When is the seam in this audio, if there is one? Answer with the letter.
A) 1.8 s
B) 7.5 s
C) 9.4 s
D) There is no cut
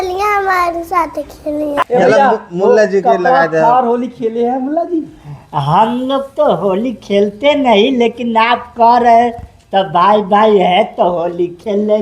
A